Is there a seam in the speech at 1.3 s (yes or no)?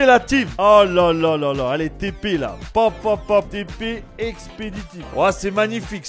no